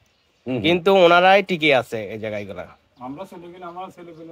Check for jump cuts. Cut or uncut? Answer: uncut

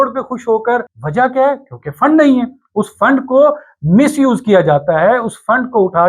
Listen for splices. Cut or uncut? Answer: cut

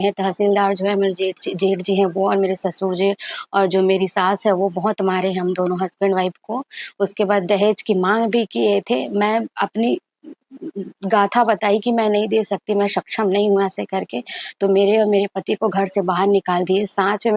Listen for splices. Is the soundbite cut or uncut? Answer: uncut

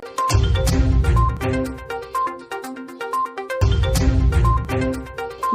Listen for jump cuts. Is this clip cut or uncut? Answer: cut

